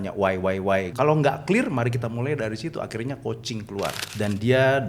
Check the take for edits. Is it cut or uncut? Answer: cut